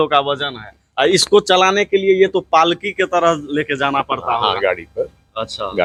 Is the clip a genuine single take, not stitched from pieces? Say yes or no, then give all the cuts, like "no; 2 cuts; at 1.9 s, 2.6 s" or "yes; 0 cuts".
yes; 0 cuts